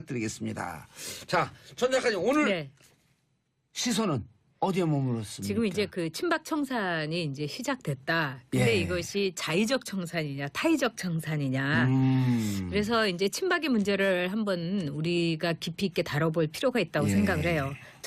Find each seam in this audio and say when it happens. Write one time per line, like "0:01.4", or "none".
none